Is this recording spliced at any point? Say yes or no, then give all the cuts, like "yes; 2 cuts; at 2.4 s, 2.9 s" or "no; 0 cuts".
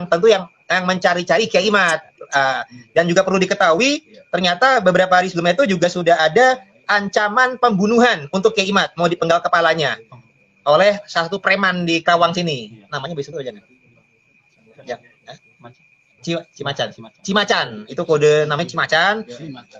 no; 0 cuts